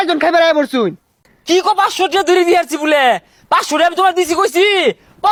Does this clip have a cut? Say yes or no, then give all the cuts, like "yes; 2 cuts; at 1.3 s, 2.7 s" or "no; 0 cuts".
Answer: no; 0 cuts